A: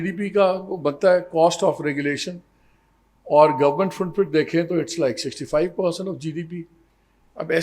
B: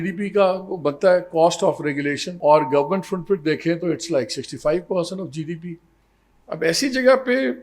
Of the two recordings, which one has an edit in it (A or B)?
B